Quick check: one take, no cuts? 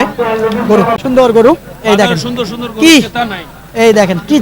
no; 1 cut; at 1.0 s

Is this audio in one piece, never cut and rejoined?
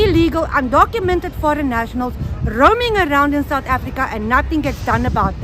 yes; 0 cuts

